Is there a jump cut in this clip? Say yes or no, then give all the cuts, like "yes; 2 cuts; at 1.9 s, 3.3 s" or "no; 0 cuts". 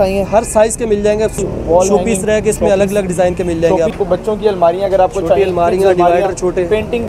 yes; 2 cuts; at 1.4 s, 3.9 s